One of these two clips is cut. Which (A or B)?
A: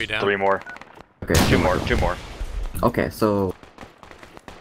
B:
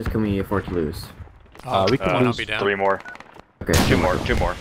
A